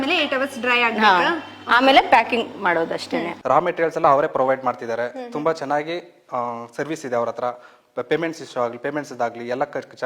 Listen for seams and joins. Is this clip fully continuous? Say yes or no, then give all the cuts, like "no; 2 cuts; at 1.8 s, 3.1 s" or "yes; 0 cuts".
no; 1 cut; at 3.3 s